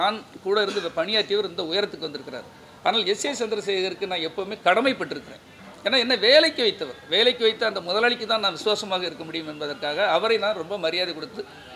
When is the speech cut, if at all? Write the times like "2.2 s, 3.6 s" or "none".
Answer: none